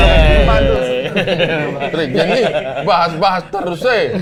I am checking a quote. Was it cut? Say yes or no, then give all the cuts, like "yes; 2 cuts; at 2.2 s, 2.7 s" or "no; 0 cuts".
no; 0 cuts